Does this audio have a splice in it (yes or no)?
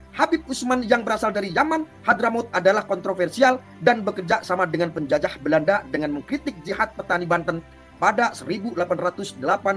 no